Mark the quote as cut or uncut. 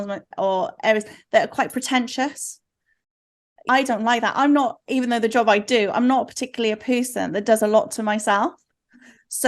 cut